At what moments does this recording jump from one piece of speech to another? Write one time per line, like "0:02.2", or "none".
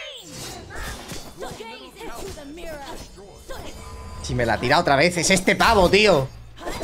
none